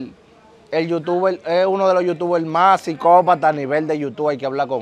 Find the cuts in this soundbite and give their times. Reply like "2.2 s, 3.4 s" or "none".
none